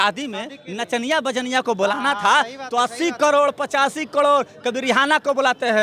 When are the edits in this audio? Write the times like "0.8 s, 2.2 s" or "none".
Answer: none